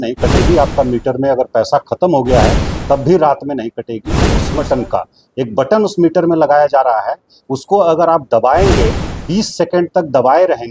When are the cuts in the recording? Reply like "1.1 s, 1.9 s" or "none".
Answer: 4.5 s